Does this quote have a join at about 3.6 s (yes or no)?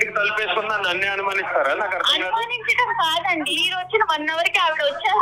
yes